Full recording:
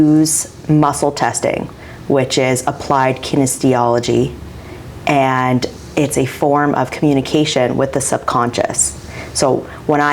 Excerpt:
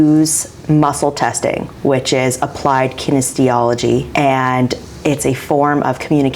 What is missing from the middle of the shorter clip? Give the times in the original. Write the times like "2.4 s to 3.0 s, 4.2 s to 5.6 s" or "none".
1.7 s to 1.9 s, 4.3 s to 5.0 s